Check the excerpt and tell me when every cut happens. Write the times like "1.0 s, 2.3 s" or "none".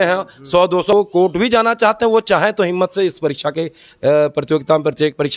0.9 s